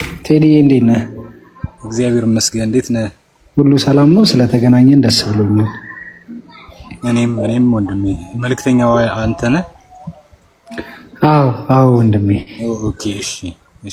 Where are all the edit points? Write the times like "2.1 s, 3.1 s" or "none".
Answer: none